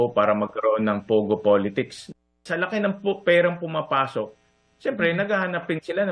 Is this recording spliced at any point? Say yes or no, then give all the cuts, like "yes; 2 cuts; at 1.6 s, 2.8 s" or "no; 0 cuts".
no; 0 cuts